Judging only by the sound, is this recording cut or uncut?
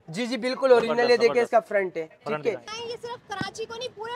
cut